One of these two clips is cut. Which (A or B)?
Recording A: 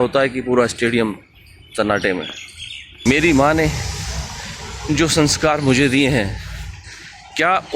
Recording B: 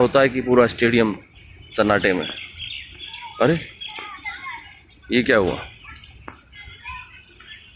A